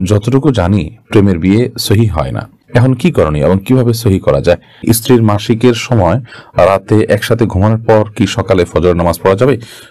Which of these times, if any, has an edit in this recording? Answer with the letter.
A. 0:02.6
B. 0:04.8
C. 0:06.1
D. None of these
B